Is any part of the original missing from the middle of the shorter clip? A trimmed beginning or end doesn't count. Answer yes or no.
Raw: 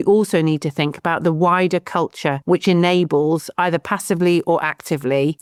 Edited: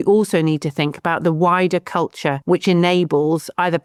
no